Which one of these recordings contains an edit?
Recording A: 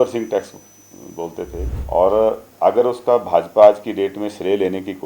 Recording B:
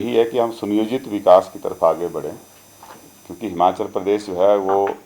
A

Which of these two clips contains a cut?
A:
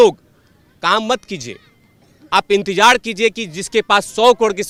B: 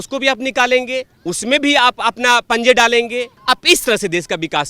B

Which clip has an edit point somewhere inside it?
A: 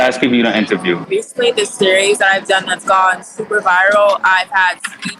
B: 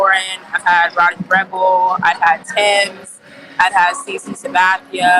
A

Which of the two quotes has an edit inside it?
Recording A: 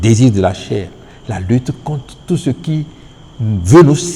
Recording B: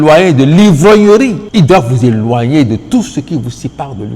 B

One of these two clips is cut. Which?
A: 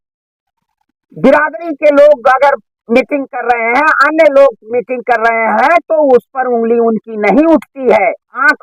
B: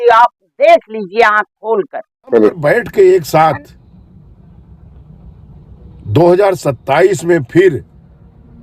B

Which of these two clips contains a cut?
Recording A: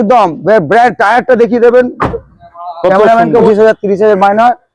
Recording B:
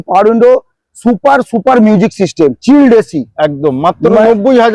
A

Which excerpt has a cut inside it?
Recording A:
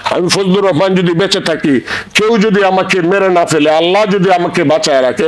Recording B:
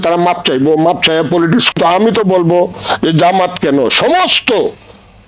B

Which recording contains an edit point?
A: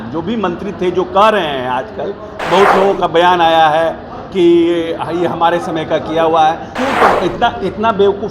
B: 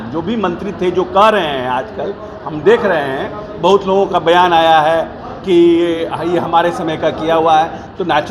A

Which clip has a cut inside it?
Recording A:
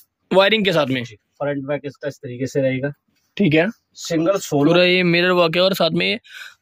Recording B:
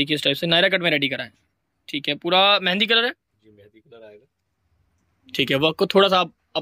A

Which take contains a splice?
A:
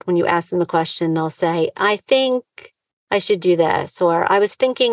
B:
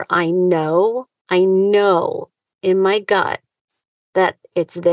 B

